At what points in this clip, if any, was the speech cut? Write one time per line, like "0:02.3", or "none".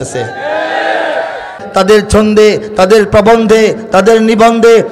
0:01.6